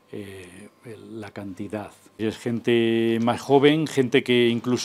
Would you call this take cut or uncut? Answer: cut